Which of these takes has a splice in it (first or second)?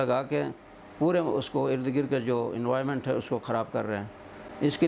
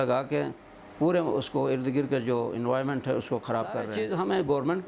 second